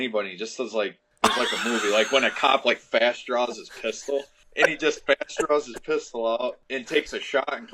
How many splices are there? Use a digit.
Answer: 3